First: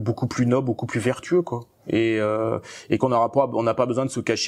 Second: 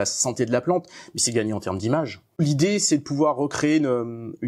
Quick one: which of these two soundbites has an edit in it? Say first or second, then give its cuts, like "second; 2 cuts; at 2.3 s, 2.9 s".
second; 1 cut; at 2.2 s